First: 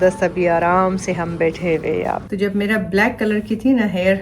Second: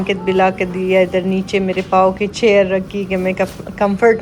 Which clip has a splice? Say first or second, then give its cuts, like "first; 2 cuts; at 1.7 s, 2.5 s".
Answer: first; 1 cut; at 2.2 s